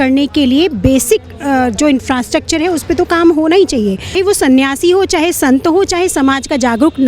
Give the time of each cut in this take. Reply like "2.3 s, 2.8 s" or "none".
4.1 s